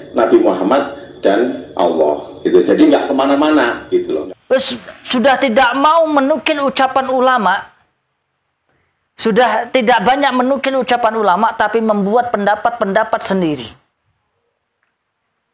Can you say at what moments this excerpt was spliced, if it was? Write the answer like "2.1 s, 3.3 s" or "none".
4.2 s